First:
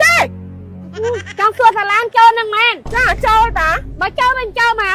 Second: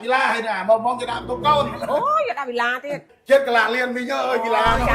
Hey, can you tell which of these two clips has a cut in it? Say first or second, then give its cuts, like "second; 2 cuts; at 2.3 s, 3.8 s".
second; 1 cut; at 3.0 s